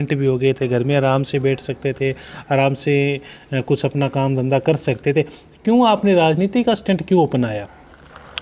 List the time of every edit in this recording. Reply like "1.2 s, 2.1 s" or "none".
none

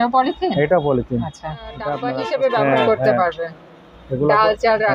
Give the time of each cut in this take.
2.1 s

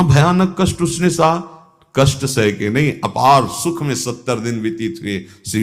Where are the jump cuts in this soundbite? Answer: none

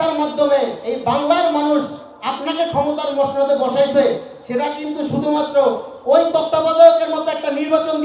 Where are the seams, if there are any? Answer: none

